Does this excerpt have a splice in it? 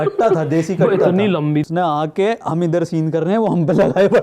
yes; 1 cut; at 1.7 s

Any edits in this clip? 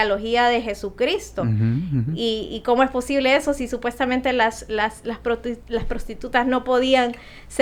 no; 0 cuts

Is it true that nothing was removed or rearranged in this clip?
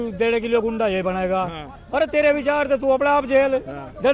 yes; 0 cuts

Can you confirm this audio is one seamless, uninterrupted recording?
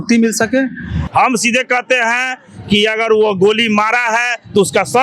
no; 1 cut; at 1.0 s

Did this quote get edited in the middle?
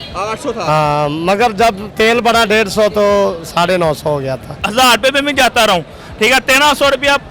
yes; 1 cut; at 4.5 s

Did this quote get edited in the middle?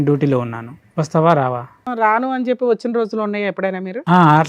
yes; 1 cut; at 1.9 s

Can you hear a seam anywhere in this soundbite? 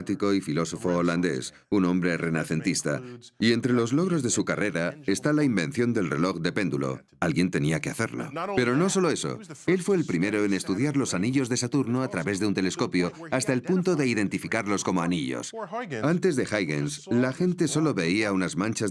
no; 0 cuts

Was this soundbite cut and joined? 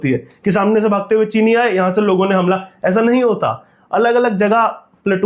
no; 0 cuts

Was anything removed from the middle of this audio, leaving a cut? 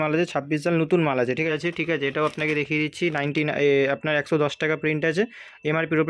yes; 1 cut; at 1.5 s

